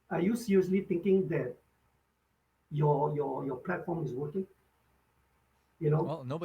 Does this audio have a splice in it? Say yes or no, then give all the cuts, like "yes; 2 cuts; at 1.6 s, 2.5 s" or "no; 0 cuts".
no; 0 cuts